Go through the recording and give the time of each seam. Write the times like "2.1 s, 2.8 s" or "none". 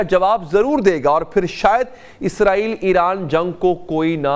none